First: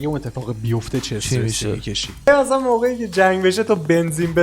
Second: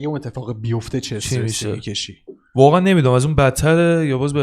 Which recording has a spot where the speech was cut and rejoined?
first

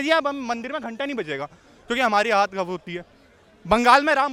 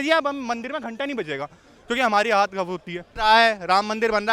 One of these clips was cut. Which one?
second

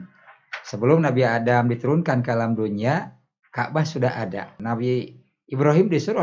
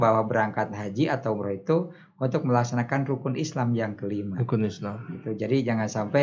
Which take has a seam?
first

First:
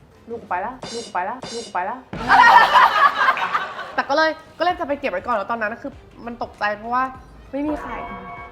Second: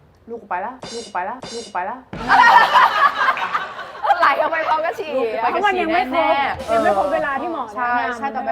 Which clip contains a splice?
first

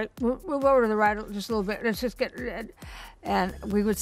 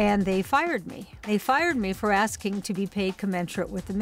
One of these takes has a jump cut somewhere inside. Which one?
second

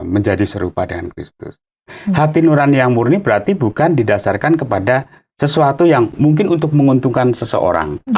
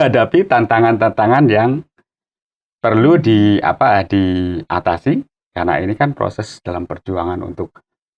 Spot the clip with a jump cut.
first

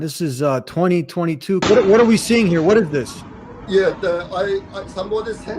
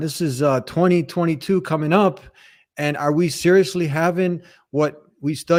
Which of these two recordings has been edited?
first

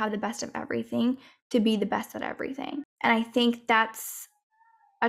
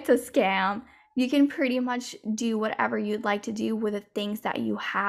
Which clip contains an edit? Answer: first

